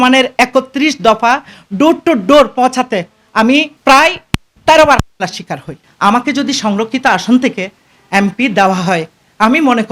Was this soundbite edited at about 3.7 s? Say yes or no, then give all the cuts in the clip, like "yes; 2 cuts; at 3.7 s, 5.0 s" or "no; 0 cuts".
yes; 2 cuts; at 3.7 s, 5.8 s